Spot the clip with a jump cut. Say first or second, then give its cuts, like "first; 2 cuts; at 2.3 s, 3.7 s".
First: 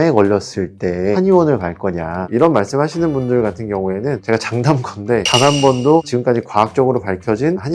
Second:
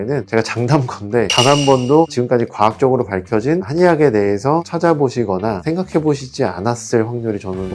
first; 1 cut; at 2.3 s